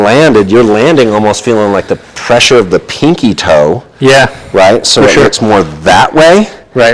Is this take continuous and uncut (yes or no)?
yes